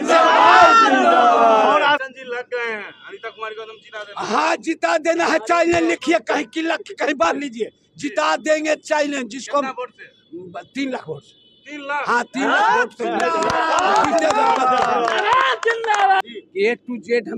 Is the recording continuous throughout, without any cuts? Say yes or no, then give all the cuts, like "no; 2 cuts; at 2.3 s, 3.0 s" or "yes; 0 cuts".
no; 2 cuts; at 2.0 s, 16.2 s